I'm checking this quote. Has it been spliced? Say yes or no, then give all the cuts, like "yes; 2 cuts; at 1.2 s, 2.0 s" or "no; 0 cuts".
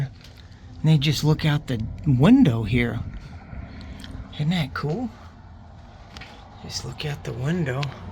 yes; 1 cut; at 3.1 s